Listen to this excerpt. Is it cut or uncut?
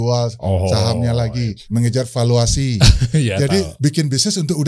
cut